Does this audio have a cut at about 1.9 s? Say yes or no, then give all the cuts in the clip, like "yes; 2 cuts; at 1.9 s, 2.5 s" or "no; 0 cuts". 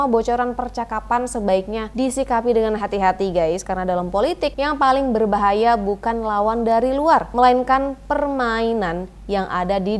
yes; 3 cuts; at 1.9 s, 4.6 s, 7.3 s